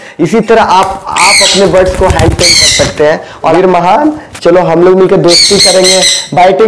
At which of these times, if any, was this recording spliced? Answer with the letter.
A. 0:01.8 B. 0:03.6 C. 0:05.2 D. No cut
B